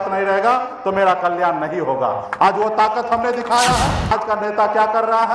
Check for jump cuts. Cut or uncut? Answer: cut